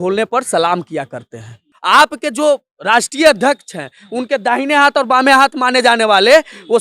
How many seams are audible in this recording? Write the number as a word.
one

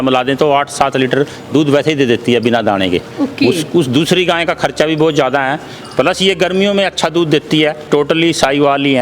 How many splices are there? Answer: one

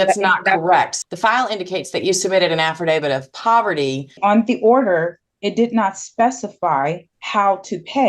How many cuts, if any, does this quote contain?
three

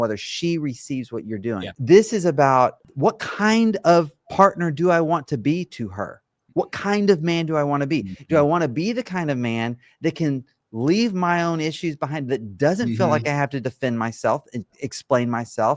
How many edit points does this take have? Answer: two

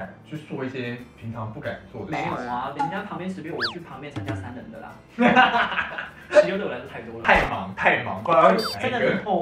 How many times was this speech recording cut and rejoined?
one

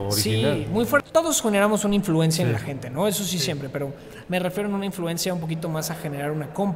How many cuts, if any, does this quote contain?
one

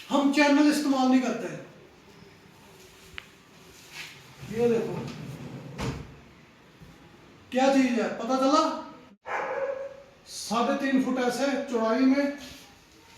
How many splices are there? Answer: one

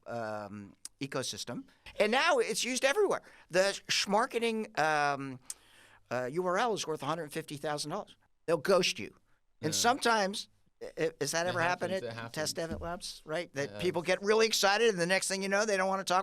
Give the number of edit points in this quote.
two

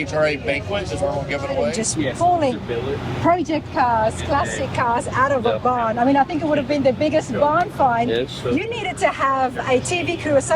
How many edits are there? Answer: one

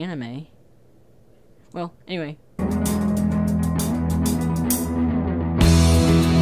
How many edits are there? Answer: one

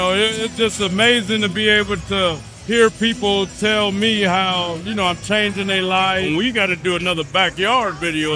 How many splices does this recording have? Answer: two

